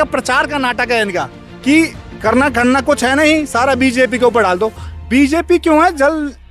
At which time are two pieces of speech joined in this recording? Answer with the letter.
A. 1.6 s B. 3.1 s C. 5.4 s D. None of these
D